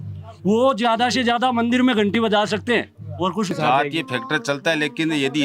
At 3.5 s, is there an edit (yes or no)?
yes